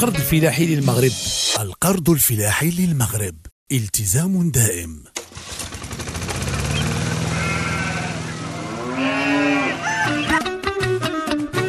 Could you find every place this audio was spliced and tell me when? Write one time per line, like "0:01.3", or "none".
0:05.2